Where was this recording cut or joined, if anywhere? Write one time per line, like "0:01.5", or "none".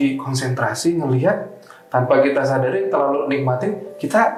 none